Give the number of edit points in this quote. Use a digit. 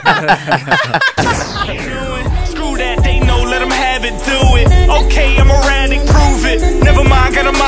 1